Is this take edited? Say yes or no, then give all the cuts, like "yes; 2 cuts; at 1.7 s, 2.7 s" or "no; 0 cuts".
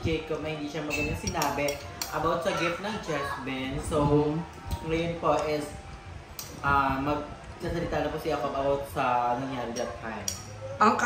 no; 0 cuts